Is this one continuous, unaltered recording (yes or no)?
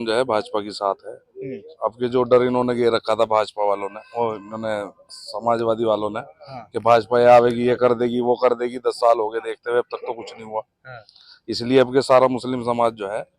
yes